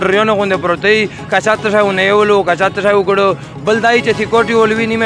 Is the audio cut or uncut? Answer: uncut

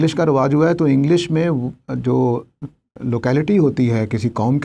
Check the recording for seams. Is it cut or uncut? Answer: uncut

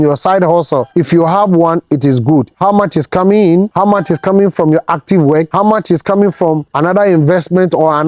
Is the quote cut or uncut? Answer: uncut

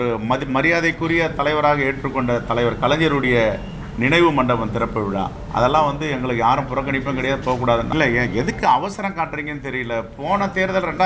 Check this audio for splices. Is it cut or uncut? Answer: cut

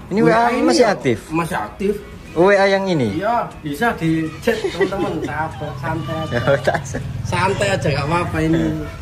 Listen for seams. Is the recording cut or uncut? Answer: uncut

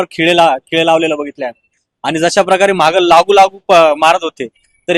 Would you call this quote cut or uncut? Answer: uncut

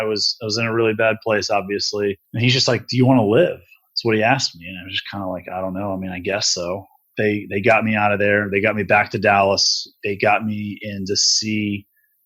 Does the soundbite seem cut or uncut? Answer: cut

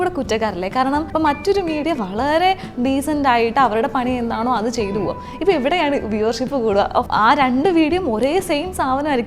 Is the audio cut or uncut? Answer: cut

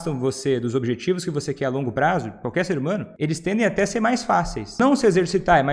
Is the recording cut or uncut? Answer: cut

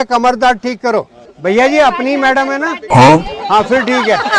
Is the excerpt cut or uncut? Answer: cut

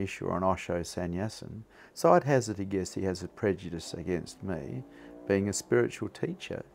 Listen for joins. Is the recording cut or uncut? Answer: uncut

